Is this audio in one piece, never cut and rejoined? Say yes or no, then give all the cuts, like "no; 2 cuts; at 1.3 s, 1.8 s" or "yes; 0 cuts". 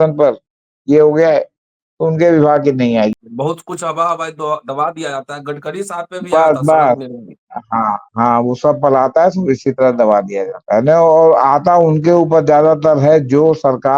no; 1 cut; at 3.1 s